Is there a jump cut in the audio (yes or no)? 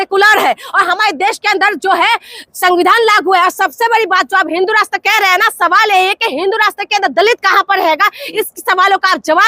no